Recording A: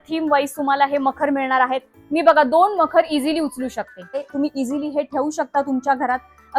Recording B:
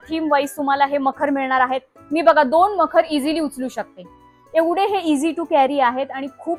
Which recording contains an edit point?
A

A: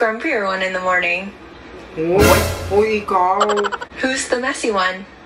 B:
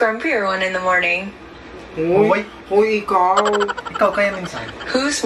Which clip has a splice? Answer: A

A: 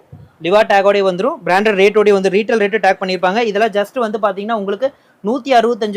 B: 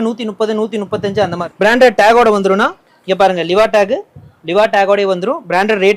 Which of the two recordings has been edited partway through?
B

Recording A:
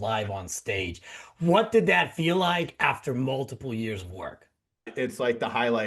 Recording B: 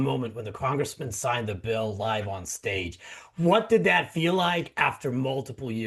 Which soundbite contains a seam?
A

